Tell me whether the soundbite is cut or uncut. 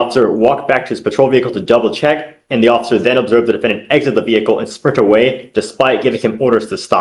uncut